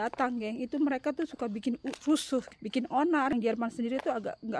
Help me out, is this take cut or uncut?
cut